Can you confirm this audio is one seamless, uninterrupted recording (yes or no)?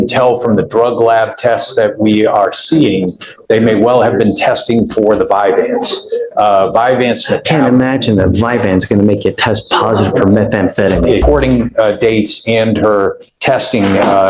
no